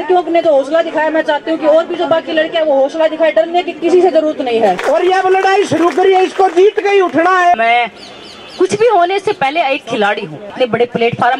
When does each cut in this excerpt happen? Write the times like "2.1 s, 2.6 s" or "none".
4.8 s, 7.5 s, 10.5 s